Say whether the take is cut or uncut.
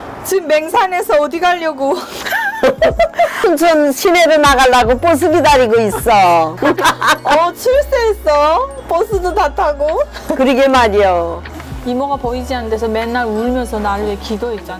cut